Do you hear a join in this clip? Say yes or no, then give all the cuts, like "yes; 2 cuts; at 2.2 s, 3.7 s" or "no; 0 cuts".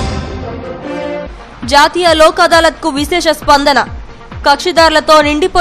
yes; 1 cut; at 1.0 s